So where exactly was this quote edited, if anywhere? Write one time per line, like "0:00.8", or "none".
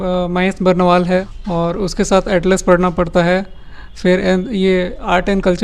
0:01.3